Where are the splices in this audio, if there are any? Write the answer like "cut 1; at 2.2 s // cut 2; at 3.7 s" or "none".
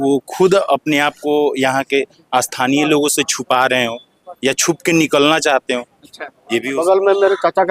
cut 1; at 6.7 s